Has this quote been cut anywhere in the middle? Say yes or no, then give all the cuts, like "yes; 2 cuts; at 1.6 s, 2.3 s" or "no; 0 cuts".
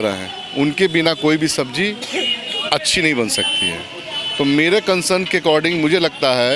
no; 0 cuts